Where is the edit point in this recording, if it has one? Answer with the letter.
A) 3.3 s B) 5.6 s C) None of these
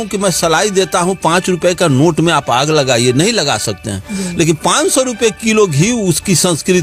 C